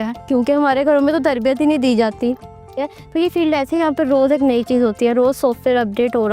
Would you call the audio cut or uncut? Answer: cut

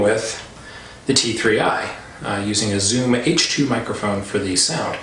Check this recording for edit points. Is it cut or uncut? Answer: cut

